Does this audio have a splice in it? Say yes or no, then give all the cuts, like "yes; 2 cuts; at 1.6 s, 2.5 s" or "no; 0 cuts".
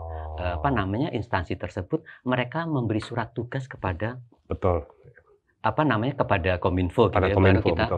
no; 0 cuts